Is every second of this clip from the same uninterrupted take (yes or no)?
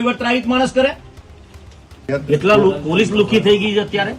yes